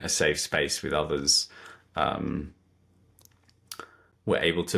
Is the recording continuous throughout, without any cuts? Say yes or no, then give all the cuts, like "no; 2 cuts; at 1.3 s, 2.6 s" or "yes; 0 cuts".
yes; 0 cuts